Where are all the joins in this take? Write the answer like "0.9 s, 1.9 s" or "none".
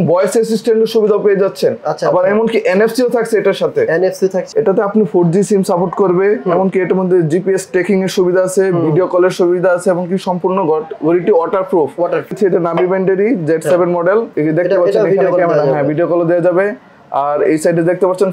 4.4 s, 12.3 s, 14.3 s

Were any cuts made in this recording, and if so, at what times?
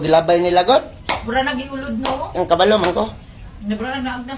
none

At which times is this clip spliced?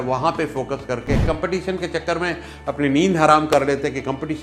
1.2 s

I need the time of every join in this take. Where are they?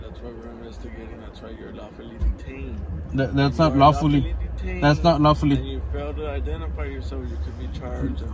none

